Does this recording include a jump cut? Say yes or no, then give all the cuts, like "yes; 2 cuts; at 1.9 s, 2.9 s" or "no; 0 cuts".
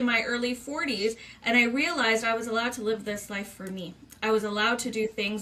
no; 0 cuts